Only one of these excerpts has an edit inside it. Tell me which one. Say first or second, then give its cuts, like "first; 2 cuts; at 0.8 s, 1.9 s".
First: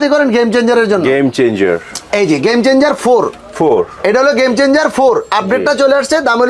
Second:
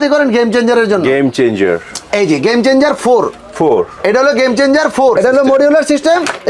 second; 1 cut; at 5.2 s